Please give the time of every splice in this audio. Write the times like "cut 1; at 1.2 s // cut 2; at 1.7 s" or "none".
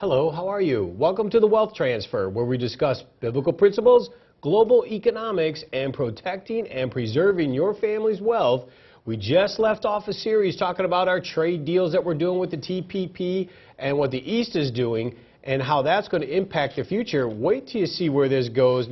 cut 1; at 8.2 s

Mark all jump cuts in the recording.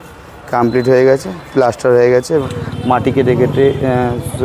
cut 1; at 2.5 s

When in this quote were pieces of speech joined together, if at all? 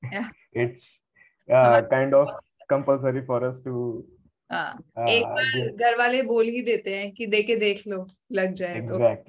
none

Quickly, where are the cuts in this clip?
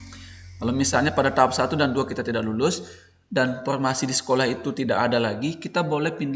none

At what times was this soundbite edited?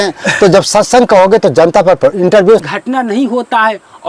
cut 1; at 2.6 s

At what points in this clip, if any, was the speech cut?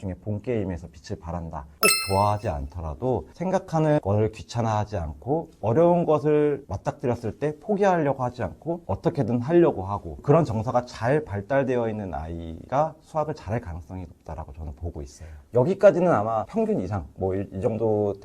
cut 1; at 1.6 s // cut 2; at 3.3 s

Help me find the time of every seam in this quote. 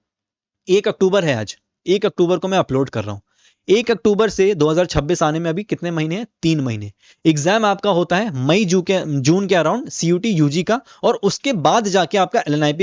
none

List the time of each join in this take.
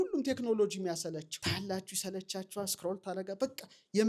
cut 1; at 1.3 s

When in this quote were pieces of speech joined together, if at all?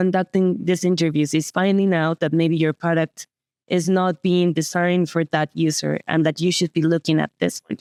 none

